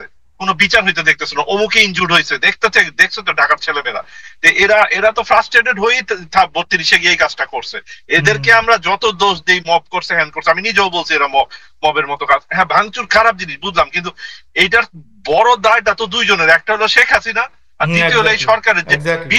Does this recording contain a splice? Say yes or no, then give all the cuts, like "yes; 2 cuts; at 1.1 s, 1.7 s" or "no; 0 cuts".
no; 0 cuts